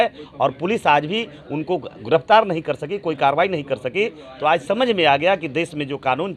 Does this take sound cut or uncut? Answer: uncut